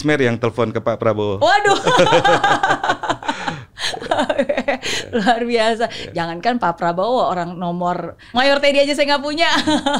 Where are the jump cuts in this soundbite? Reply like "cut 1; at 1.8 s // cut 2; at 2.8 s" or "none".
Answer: none